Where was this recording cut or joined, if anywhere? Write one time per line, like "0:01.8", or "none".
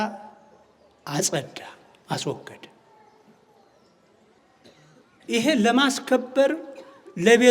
0:04.4